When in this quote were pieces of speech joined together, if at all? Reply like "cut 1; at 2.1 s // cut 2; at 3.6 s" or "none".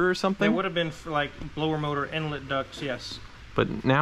none